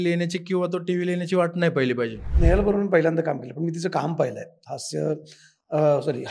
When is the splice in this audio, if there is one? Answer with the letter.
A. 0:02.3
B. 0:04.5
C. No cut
A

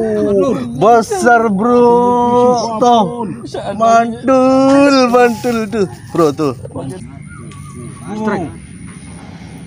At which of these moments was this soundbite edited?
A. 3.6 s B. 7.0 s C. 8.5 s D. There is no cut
B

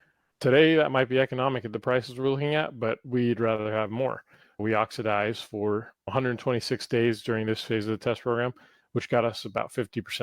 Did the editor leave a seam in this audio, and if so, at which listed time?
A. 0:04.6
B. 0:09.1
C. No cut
A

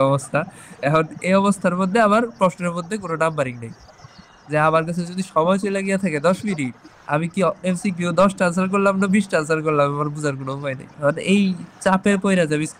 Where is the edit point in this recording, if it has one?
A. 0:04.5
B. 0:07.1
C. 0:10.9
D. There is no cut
C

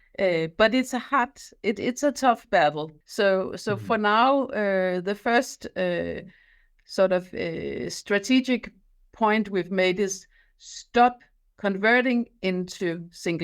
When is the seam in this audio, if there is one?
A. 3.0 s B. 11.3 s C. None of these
A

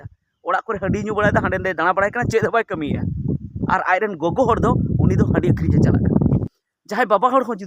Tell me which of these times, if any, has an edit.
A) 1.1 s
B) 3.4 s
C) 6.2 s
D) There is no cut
C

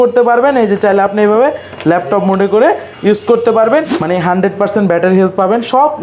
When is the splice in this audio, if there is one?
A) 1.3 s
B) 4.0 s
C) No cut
B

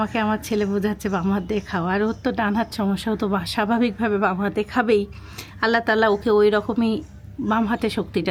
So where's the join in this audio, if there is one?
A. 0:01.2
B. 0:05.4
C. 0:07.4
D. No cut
D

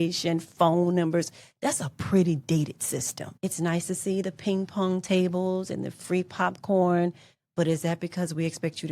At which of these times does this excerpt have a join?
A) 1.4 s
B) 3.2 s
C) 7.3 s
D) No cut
B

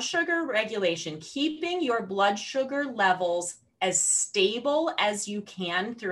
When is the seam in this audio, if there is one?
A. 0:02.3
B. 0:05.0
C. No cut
C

